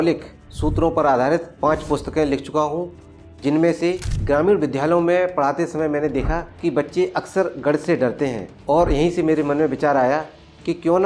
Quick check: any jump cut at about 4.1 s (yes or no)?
yes